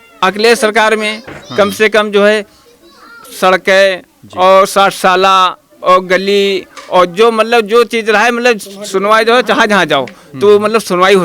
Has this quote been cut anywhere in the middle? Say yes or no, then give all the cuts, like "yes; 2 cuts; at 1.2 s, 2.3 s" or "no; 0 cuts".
no; 0 cuts